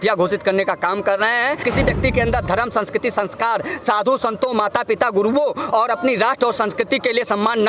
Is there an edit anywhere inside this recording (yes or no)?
yes